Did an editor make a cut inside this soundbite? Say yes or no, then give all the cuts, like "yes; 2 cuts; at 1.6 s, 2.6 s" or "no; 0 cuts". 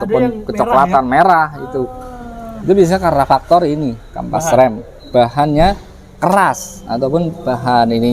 no; 0 cuts